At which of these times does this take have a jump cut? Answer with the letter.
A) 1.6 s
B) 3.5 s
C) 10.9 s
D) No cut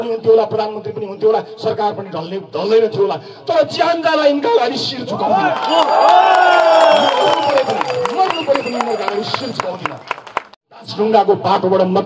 C